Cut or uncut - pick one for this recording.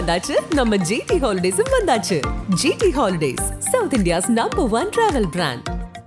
uncut